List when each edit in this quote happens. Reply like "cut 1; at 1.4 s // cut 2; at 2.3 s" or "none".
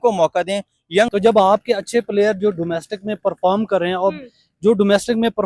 cut 1; at 1.1 s